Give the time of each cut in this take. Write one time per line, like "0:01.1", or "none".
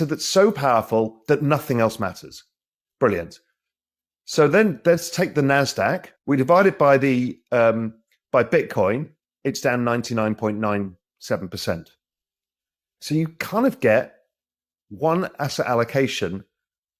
0:06.1